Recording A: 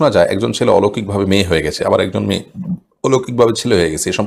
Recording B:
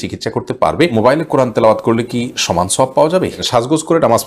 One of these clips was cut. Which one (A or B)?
B